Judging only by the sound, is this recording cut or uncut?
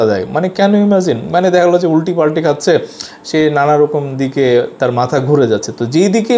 uncut